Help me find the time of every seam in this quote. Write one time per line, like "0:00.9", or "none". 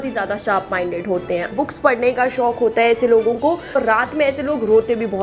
0:01.5
0:03.8